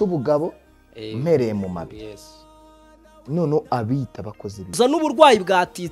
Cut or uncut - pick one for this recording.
cut